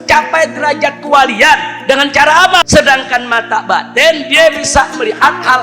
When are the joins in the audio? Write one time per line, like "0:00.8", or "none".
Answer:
0:02.6